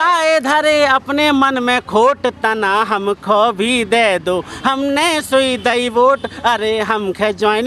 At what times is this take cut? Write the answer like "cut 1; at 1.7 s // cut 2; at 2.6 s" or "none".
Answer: none